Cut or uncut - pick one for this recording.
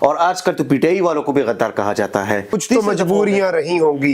cut